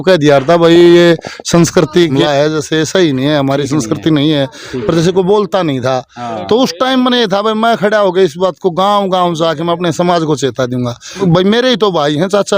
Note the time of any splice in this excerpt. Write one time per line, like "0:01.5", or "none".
0:02.1
0:11.2